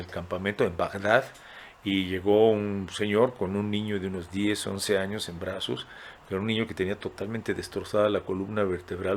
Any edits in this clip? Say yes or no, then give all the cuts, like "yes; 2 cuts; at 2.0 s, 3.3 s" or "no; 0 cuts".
no; 0 cuts